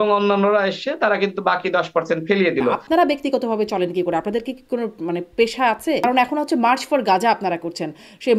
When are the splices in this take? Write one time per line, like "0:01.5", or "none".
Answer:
0:02.8
0:06.0